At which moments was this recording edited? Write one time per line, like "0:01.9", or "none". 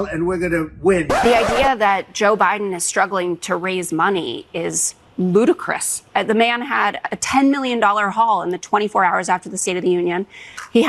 0:01.2